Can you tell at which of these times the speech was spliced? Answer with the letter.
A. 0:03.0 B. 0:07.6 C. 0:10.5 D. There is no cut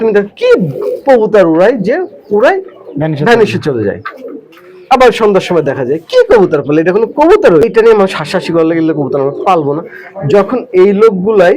B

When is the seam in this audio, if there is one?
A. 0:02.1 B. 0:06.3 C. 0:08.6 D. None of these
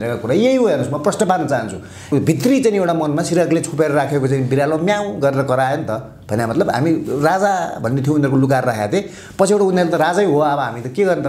A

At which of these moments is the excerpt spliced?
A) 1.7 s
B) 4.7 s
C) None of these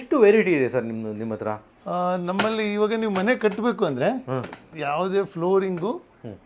B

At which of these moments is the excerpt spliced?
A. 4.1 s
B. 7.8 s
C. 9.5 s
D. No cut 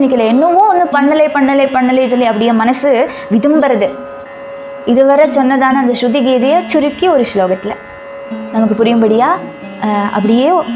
A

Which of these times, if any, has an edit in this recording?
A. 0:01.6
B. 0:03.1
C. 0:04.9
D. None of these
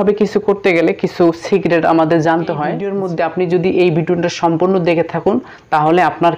B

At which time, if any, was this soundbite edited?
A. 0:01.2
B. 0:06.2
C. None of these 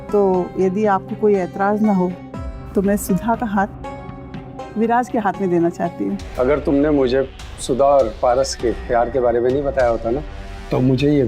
B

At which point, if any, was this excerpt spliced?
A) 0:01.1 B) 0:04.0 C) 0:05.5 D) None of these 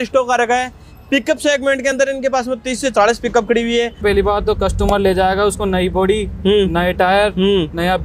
B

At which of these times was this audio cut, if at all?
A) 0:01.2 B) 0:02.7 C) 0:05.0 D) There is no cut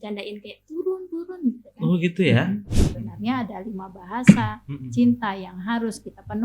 B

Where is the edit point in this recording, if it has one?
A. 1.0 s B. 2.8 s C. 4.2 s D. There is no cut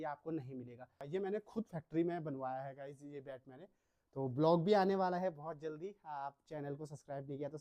A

